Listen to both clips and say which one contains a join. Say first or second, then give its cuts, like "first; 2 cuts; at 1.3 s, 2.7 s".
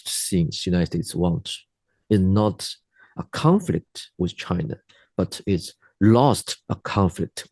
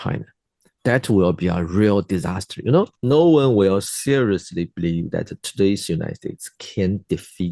second; 1 cut; at 3.0 s